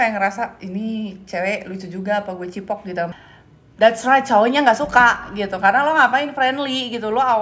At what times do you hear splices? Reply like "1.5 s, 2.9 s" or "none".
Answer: 3.1 s

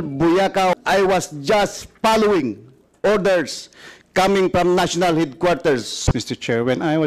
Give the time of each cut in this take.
0.8 s, 6.0 s

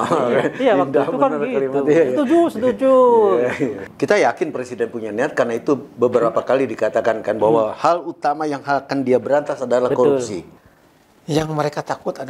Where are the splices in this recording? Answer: 3.8 s, 10.4 s

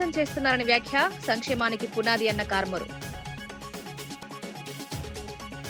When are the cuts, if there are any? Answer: none

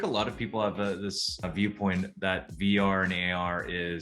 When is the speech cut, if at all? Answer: 1.4 s

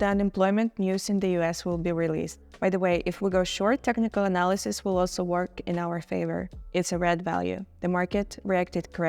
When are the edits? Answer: 2.4 s, 6.6 s

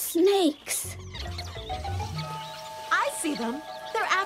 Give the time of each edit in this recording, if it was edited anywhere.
1.2 s

